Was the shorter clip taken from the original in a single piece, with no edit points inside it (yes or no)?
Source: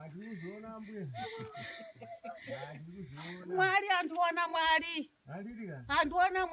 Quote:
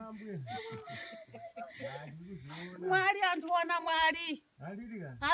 yes